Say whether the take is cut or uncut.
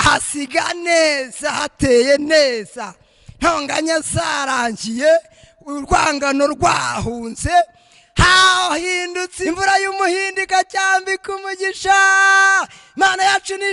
cut